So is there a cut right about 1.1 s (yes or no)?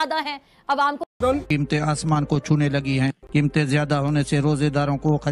yes